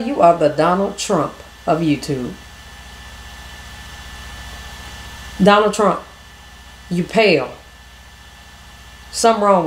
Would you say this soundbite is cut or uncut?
uncut